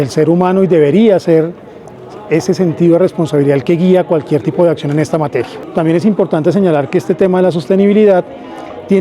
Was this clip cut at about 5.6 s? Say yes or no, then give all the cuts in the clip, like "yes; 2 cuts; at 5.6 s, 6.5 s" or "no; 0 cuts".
yes; 1 cut; at 5.6 s